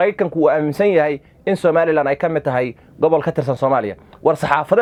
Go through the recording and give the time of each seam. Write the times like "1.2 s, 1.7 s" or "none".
none